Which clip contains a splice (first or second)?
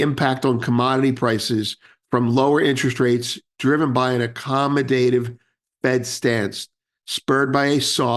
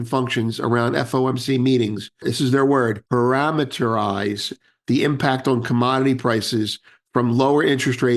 second